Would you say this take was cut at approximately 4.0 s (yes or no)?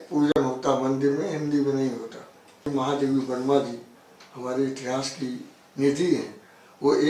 no